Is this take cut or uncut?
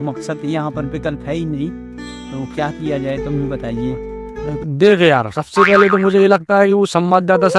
uncut